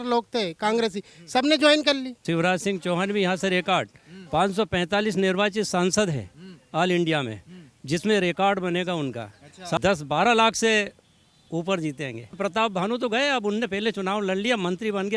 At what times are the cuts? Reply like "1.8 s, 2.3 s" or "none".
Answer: 2.2 s, 9.8 s, 12.3 s

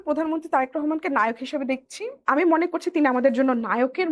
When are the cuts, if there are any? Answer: 2.2 s

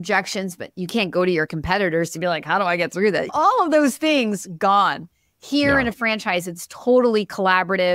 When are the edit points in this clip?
none

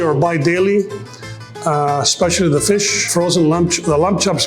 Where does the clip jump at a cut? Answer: 3.1 s

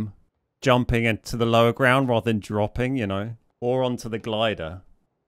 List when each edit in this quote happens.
3.4 s

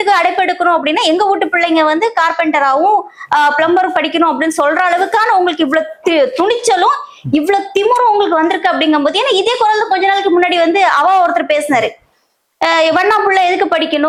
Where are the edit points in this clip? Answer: none

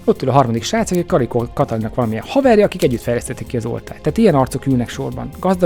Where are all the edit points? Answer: none

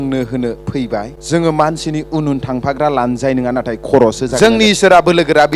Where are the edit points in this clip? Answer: 1.2 s, 4.3 s

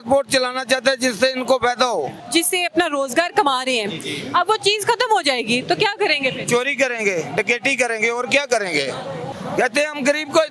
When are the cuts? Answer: 2.2 s, 9.3 s

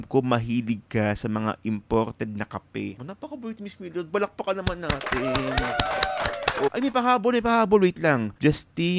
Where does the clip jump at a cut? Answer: 3.0 s, 6.7 s

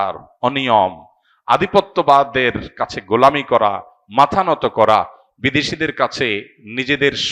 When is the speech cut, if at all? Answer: none

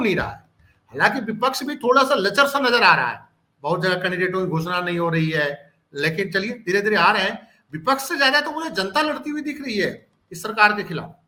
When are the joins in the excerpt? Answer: none

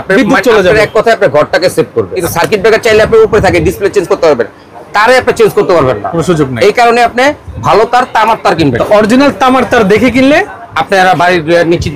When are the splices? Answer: 2.2 s, 8.8 s

